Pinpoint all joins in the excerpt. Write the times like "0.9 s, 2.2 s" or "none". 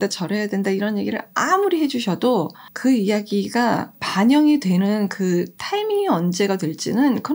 2.6 s, 4.0 s